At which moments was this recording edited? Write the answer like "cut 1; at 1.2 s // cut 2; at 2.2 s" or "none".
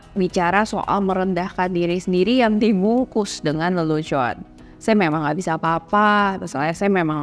cut 1; at 4.6 s